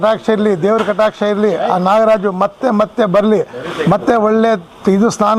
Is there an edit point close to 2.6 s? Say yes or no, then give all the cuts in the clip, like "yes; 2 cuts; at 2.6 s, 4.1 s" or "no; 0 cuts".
no; 0 cuts